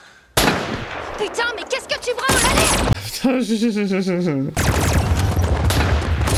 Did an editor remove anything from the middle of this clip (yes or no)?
no